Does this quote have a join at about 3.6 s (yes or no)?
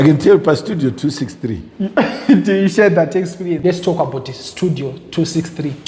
yes